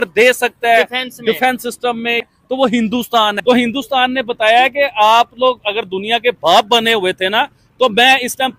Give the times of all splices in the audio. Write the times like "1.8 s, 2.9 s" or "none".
3.4 s